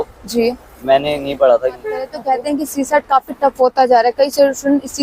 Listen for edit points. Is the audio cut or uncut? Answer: cut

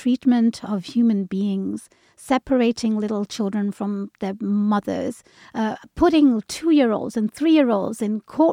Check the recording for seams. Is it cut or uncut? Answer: uncut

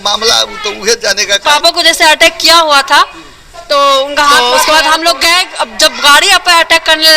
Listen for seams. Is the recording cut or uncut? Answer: cut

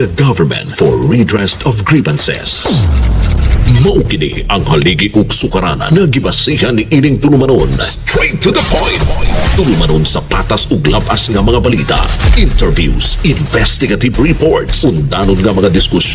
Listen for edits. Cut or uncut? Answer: uncut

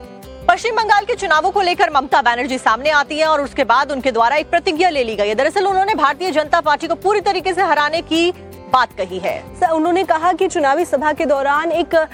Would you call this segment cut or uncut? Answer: uncut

